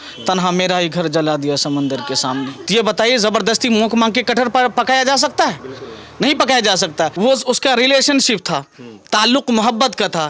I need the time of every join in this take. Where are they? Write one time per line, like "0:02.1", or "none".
0:02.6
0:07.1